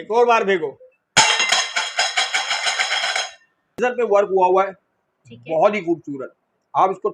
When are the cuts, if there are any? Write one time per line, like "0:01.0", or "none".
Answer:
0:03.8